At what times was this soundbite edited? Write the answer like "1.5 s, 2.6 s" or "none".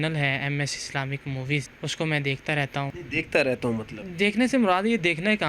1.7 s, 3.0 s, 4.0 s